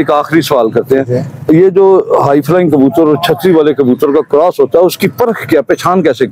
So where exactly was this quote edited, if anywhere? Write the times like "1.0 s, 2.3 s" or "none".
none